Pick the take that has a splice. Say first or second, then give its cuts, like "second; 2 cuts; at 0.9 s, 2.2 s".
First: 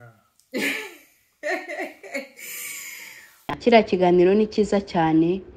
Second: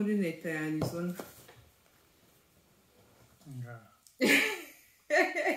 first; 1 cut; at 3.5 s